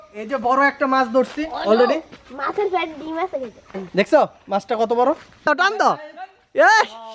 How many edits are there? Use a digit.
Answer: 1